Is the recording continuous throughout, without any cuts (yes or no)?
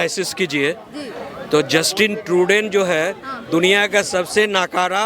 yes